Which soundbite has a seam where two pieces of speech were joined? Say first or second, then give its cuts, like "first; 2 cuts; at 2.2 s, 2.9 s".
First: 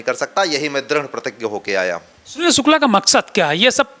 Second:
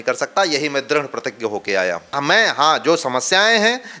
second; 1 cut; at 2.1 s